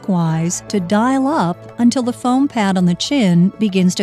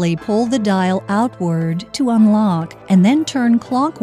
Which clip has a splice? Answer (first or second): second